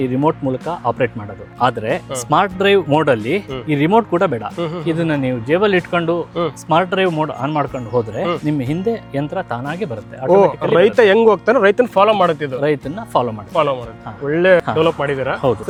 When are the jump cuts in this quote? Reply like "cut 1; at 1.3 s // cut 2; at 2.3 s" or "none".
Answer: none